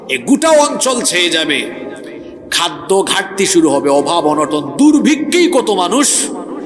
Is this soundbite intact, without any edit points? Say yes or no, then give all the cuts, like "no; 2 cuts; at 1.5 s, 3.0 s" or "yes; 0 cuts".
yes; 0 cuts